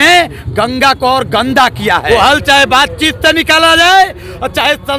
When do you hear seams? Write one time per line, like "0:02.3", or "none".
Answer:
0:02.0